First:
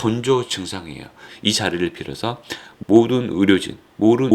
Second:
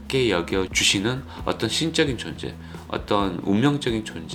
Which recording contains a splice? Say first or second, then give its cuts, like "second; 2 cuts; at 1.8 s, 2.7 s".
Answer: first; 1 cut; at 1.2 s